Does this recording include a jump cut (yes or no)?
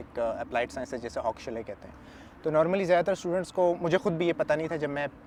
no